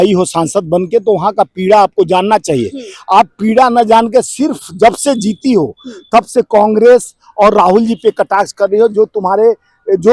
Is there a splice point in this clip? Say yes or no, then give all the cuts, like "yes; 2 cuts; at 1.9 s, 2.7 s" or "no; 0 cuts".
no; 0 cuts